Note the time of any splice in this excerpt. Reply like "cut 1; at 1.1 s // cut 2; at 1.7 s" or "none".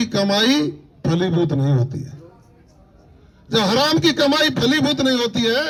none